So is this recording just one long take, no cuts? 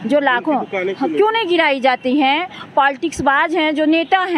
yes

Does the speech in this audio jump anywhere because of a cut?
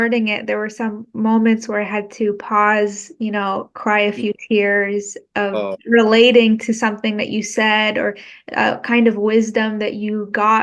no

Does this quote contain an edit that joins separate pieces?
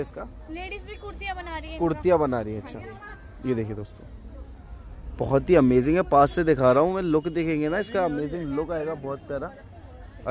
no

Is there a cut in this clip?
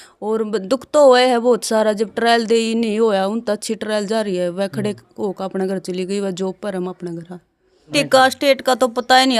yes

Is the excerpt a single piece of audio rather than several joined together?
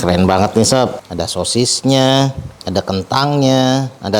no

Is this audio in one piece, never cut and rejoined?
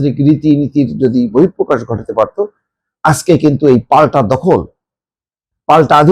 yes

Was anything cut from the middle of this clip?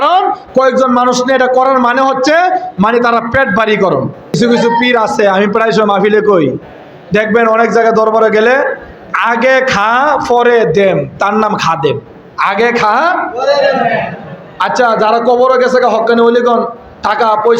yes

